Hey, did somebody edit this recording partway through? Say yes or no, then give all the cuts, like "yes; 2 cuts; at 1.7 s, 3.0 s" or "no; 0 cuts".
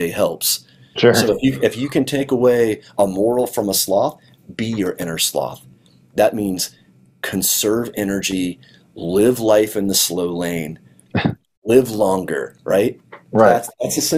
no; 0 cuts